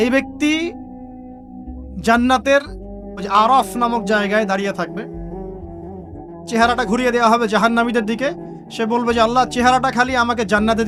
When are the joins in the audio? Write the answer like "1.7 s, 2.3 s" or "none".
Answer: none